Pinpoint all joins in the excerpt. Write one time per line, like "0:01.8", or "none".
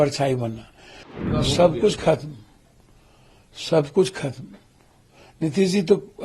0:01.2